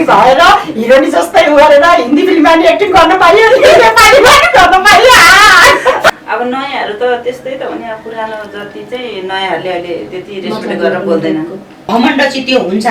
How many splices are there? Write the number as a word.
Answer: two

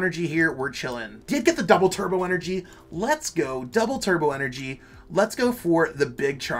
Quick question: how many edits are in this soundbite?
one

